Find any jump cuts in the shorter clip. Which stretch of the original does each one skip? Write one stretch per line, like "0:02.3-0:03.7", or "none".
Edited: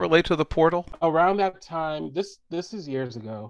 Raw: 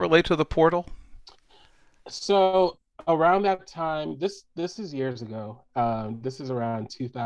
0:00.9-0:03.0